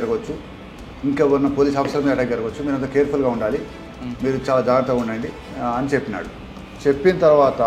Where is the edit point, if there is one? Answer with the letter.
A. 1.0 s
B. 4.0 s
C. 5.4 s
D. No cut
C